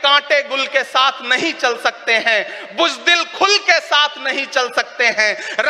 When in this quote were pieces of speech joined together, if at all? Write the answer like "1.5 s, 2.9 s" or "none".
none